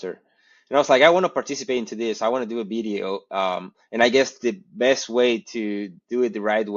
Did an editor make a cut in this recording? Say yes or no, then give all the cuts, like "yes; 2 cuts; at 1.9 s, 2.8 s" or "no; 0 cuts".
no; 0 cuts